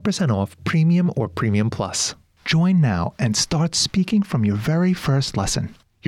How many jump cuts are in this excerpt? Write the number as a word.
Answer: one